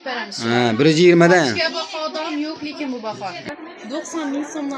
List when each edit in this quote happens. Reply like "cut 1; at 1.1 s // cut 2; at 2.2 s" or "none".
cut 1; at 3.5 s